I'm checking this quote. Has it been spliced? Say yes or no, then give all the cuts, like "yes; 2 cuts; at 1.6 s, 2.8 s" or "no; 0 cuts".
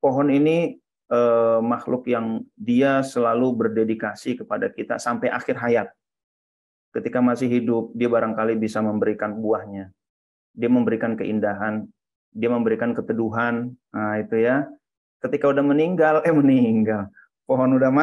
no; 0 cuts